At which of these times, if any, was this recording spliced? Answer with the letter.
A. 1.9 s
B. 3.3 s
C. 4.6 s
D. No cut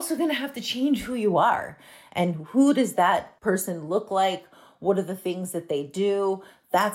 B